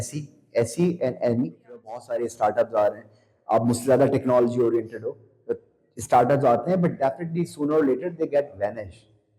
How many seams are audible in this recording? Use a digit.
1